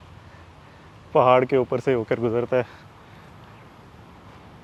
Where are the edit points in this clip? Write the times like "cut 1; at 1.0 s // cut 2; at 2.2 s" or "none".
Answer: none